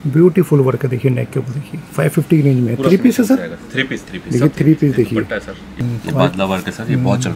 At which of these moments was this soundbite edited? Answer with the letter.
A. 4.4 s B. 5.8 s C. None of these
B